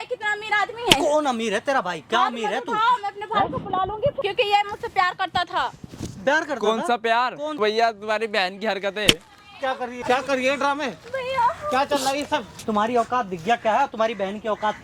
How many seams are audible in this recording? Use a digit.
4